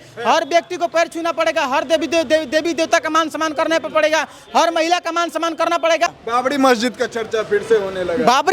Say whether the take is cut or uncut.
cut